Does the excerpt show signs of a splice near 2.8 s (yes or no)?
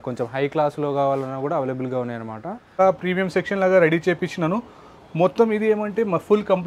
yes